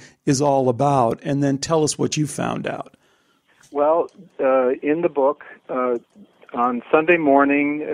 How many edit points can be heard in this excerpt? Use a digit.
0